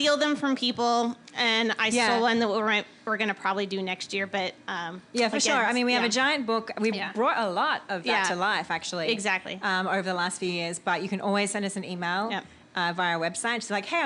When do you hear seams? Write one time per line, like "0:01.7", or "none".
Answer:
none